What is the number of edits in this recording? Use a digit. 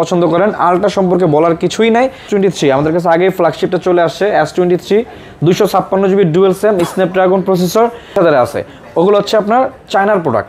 2